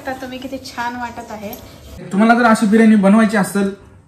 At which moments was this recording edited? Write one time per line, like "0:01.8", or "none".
0:02.1